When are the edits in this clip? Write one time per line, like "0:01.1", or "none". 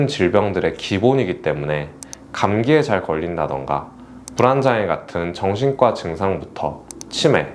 none